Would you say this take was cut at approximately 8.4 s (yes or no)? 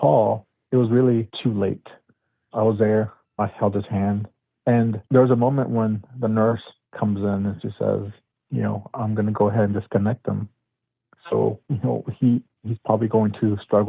no